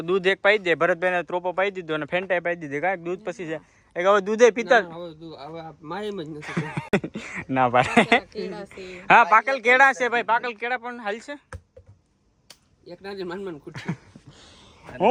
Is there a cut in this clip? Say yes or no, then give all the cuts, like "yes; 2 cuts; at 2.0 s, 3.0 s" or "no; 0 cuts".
no; 0 cuts